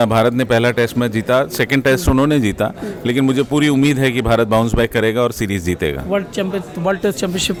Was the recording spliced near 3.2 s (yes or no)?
no